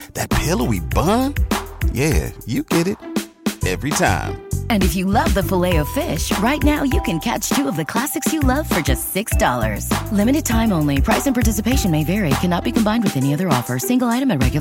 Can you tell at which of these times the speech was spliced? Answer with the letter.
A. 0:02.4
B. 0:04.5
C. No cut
C